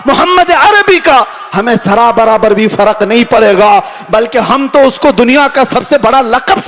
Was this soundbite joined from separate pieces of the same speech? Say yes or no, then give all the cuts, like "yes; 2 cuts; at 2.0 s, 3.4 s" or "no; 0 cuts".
no; 0 cuts